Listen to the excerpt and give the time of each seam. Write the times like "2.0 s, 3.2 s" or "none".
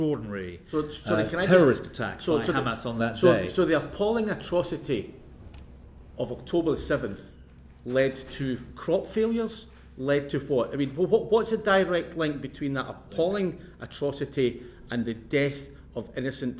none